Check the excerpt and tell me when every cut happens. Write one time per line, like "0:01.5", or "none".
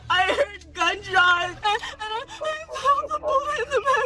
0:01.5